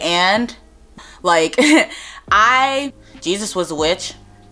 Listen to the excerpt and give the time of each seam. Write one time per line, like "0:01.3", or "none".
0:01.0
0:02.9